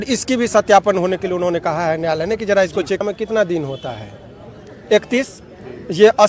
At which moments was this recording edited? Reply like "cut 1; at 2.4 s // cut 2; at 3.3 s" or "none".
cut 1; at 3.0 s